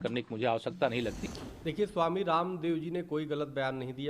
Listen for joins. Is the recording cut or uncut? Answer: cut